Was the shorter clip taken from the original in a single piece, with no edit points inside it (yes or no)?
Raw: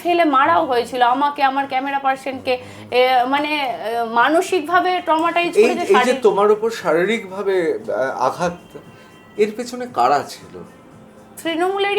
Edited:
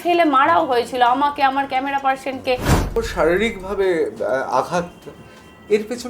no